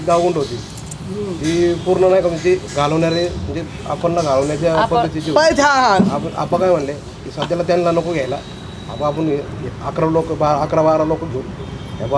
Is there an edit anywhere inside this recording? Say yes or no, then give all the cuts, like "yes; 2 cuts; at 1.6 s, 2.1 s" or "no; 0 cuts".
no; 0 cuts